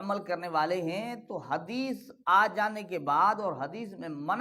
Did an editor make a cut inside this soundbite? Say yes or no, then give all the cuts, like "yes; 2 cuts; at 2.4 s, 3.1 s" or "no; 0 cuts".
no; 0 cuts